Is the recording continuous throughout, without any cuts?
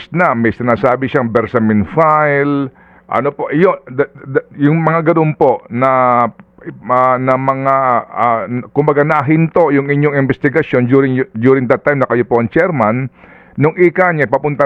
yes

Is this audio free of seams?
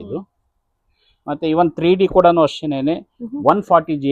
yes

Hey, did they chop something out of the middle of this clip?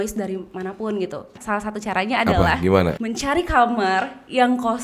yes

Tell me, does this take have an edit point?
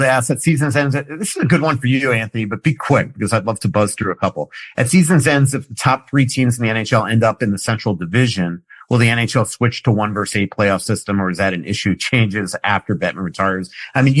no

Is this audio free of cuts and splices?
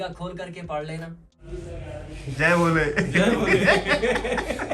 no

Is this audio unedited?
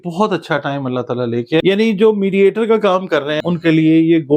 no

